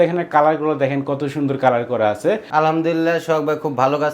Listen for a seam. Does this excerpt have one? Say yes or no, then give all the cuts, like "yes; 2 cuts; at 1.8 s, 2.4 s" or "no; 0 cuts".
yes; 1 cut; at 2.4 s